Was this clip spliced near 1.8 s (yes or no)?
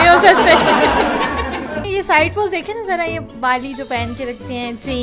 yes